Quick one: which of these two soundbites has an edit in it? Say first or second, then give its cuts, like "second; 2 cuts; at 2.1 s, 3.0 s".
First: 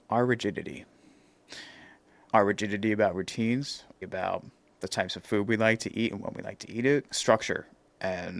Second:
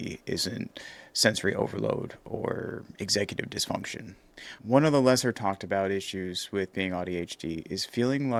first; 1 cut; at 3.9 s